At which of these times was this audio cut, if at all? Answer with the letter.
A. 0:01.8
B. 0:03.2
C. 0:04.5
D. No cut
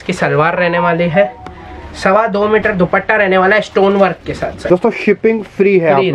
C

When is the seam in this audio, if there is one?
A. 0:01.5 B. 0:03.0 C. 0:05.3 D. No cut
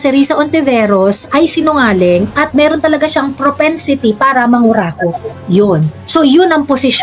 C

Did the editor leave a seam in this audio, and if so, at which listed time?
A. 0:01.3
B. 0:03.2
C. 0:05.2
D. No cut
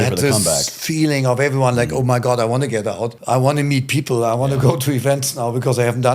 B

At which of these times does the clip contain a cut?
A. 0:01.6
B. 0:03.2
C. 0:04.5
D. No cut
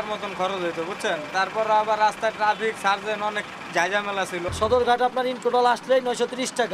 C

